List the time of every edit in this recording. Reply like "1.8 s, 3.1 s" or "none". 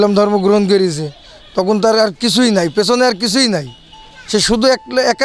none